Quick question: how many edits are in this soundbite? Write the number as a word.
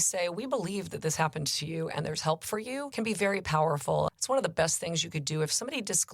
two